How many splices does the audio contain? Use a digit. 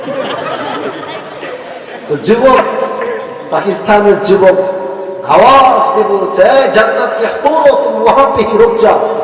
0